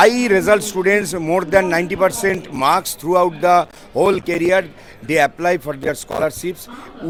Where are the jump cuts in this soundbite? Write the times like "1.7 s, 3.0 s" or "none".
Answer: none